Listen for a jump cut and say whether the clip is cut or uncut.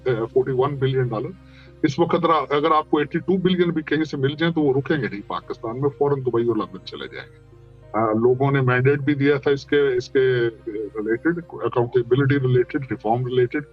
uncut